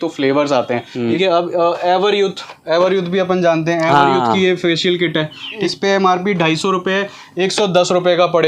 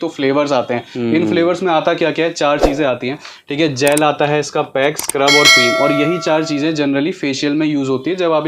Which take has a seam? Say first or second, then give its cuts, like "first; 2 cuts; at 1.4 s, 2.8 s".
first; 2 cuts; at 1.1 s, 5.6 s